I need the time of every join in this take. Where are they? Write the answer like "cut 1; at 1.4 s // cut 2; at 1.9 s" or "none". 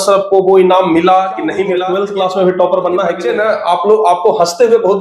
cut 1; at 1.8 s // cut 2; at 3.2 s